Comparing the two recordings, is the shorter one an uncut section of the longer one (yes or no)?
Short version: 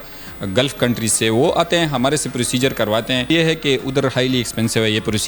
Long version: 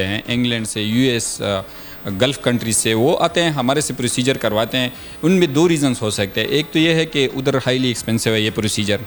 no